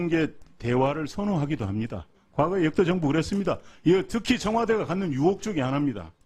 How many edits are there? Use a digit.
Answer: 0